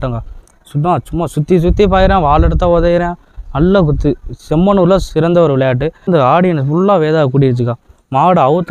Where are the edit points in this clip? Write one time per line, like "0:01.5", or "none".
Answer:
0:06.1